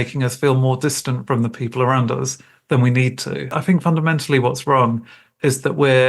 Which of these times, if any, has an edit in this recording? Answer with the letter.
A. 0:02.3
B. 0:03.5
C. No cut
B